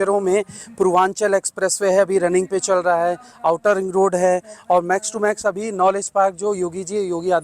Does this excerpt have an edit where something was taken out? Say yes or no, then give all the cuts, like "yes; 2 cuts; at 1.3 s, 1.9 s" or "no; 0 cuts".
no; 0 cuts